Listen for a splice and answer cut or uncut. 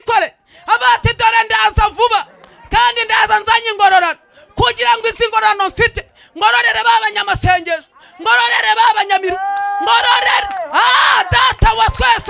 uncut